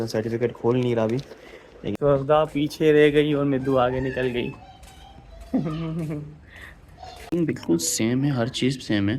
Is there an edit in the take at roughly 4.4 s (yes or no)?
no